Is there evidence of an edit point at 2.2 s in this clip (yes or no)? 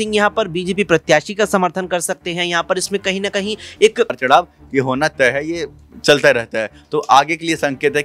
no